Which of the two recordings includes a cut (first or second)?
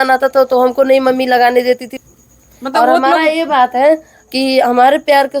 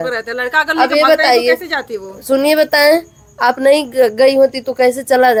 first